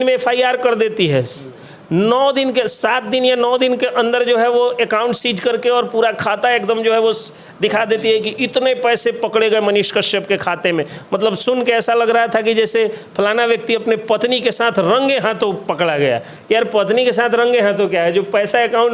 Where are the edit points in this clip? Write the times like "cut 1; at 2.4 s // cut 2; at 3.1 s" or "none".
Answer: none

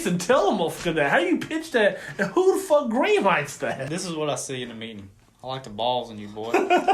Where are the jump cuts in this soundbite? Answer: cut 1; at 3.8 s

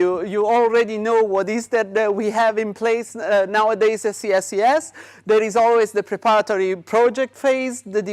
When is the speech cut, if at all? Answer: cut 1; at 5.2 s

